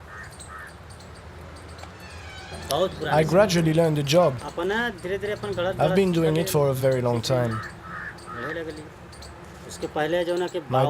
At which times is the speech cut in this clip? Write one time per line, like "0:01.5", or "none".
0:01.3

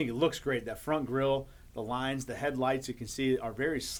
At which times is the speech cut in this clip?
none

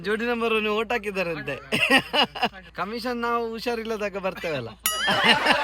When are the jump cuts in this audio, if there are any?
0:02.6

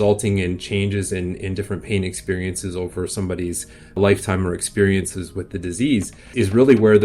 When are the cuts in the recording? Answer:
0:04.0
0:06.3

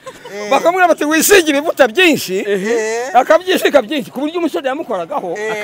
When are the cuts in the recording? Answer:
none

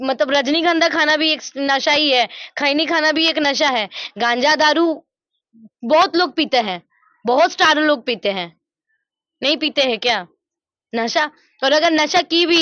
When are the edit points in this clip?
none

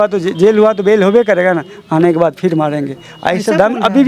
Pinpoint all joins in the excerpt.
none

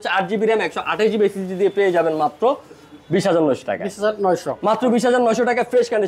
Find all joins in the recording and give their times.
none

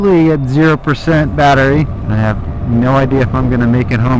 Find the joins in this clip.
0:02.0

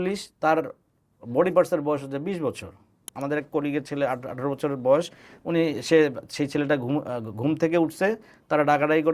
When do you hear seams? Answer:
0:03.1

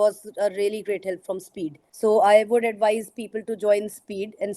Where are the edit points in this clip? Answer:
0:01.8

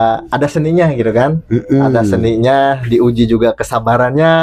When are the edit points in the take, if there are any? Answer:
none

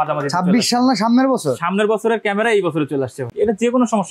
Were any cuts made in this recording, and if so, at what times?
0:03.2

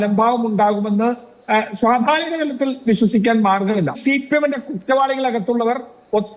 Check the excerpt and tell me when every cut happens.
0:04.0

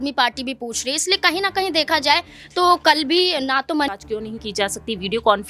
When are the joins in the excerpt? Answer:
0:03.9

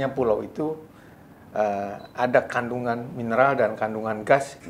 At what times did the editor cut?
none

